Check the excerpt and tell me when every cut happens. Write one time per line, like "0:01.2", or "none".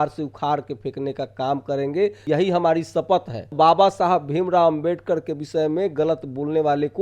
0:02.2
0:03.5